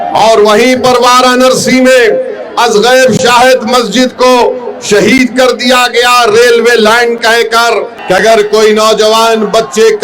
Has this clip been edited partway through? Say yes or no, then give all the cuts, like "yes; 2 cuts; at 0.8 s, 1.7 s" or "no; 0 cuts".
yes; 1 cut; at 7.9 s